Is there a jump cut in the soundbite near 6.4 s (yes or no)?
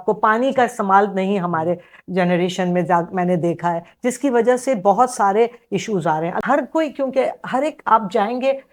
yes